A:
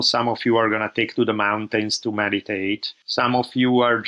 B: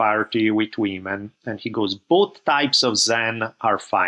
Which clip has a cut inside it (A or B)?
A